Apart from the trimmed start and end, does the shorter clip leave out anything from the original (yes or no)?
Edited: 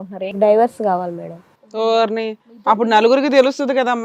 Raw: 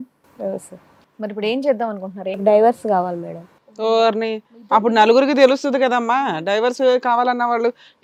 no